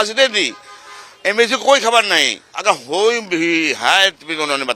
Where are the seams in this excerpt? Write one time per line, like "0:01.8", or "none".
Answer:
none